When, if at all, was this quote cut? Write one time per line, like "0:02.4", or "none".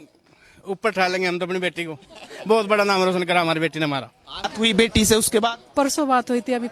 0:04.5